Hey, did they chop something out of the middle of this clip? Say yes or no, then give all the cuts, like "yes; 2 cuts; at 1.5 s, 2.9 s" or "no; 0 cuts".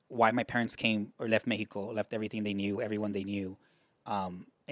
no; 0 cuts